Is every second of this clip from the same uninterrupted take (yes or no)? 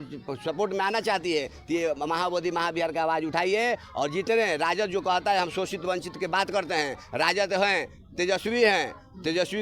yes